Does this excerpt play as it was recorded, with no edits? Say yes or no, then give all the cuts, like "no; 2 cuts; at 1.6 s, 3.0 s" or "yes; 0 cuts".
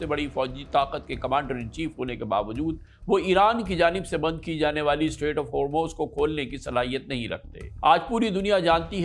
yes; 0 cuts